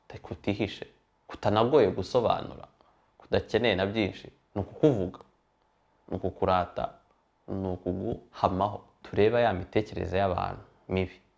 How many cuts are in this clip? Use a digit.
1